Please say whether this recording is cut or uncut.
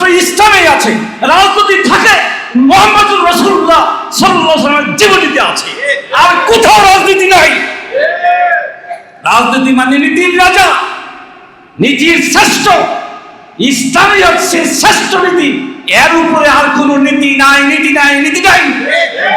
uncut